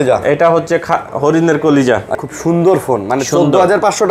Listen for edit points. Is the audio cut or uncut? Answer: cut